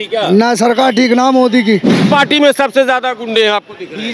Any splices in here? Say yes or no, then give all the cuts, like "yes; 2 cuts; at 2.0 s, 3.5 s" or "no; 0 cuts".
yes; 1 cut; at 2.0 s